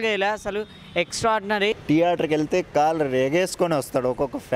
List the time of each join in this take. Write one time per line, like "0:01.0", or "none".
0:01.8